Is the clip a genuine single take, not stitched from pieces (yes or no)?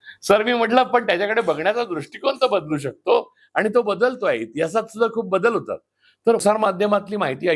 no